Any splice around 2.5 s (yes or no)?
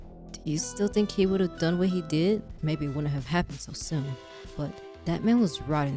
yes